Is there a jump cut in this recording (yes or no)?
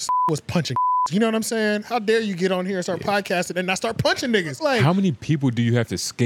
yes